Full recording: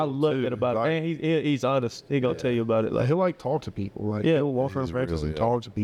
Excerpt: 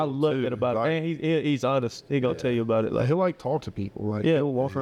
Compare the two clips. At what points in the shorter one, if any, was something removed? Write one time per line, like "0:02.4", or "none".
none

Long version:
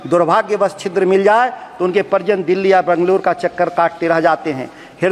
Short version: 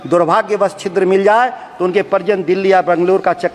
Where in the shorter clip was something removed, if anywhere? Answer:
none

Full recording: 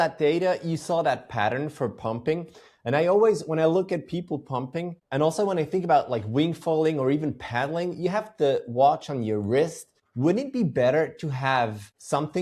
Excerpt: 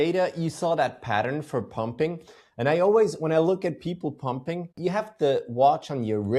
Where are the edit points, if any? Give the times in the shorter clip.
0:04.8

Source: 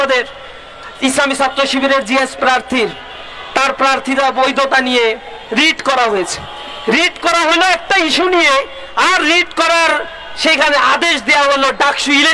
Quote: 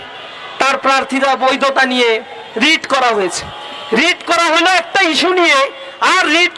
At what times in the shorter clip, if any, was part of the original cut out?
none

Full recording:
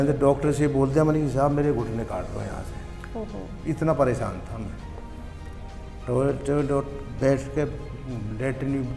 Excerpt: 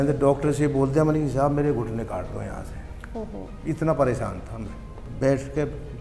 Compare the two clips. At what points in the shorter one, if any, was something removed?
0:05.0

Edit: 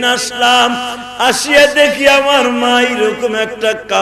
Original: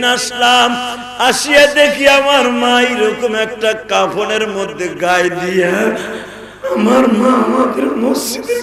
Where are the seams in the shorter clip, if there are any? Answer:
none

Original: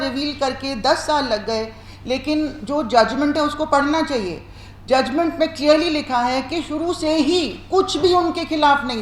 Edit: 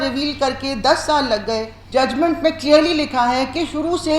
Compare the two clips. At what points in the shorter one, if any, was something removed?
0:01.7

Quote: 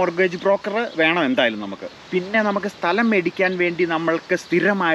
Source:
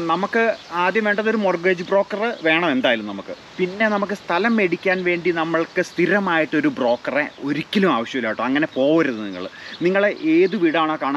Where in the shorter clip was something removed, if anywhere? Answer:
none

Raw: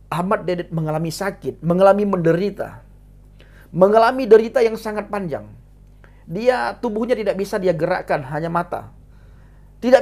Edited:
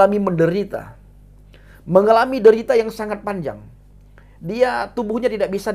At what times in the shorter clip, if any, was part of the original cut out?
none

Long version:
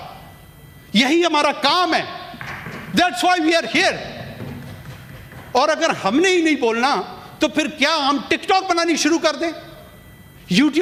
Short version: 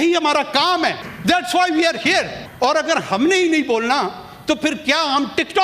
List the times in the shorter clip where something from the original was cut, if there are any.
0:01.1
0:02.4

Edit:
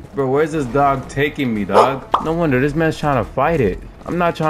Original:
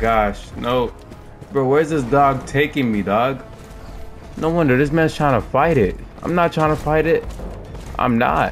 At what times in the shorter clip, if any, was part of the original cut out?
0:02.1

